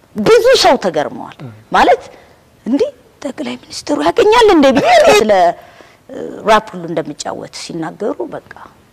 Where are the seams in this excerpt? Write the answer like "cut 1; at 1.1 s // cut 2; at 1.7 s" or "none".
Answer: none